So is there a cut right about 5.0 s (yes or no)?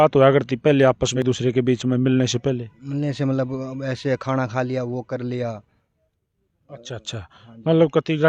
no